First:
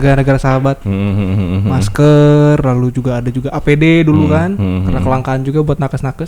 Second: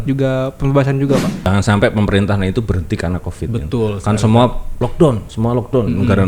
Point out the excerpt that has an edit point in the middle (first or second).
second